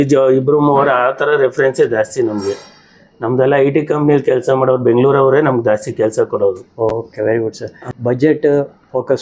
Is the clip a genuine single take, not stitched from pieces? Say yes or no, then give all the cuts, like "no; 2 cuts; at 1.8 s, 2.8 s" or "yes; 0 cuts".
yes; 0 cuts